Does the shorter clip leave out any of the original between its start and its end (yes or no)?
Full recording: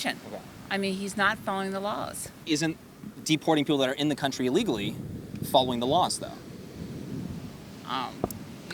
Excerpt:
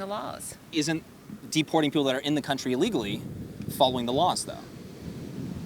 no